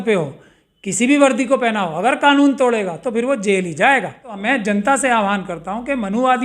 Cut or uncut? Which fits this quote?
cut